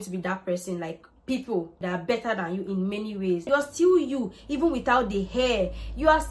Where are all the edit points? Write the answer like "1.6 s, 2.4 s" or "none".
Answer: 1.8 s, 3.4 s